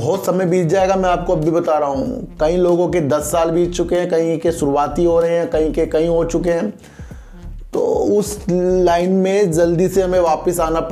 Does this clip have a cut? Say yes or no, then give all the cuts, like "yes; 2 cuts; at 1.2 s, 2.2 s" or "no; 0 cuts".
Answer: no; 0 cuts